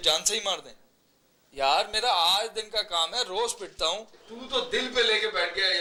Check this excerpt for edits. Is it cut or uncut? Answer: uncut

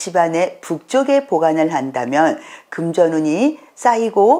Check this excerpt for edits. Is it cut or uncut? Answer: uncut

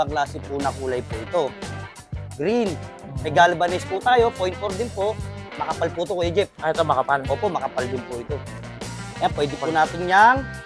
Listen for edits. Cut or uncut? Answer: cut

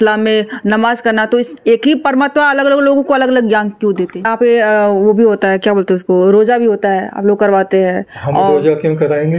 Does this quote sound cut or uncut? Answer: cut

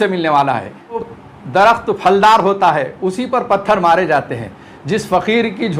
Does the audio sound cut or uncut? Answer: cut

